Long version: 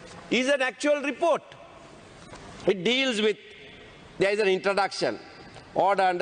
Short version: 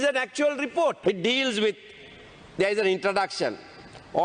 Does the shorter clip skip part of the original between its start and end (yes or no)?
yes